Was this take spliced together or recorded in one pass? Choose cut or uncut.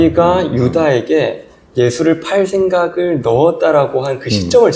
uncut